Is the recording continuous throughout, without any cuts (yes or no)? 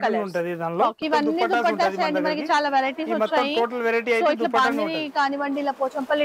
no